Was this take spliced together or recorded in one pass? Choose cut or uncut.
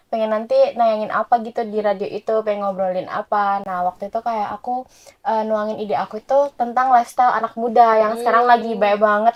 uncut